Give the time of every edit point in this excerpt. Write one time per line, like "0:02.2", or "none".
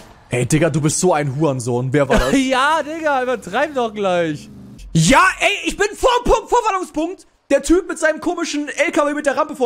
0:02.1

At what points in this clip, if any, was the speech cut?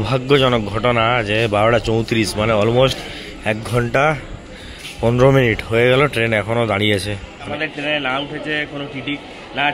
0:07.5

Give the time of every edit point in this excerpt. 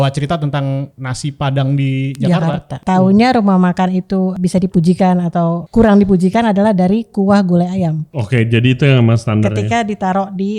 0:01.0
0:02.8
0:04.3
0:05.6
0:08.1

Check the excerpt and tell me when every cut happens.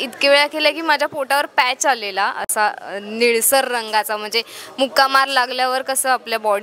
none

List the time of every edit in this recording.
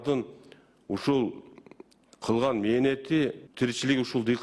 0:03.4

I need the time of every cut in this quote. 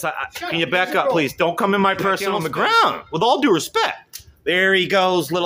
0:02.4

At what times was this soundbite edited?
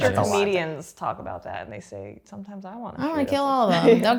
none

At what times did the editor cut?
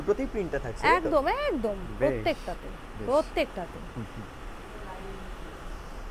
none

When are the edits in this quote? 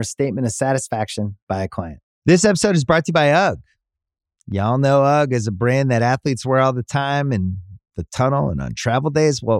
0:02.1

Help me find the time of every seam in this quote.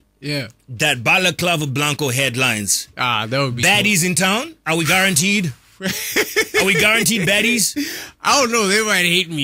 none

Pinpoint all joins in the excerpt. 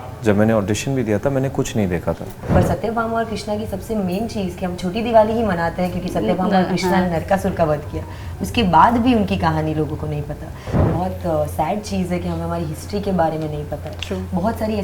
0:02.3
0:10.7

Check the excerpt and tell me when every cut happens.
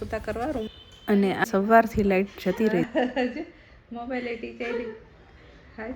0:01.4

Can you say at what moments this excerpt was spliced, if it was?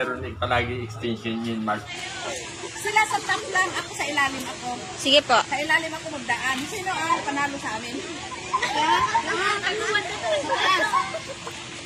0:02.0

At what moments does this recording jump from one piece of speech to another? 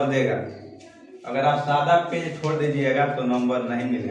none

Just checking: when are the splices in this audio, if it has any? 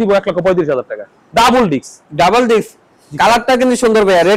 none

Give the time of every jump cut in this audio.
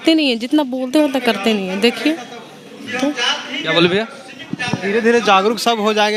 none

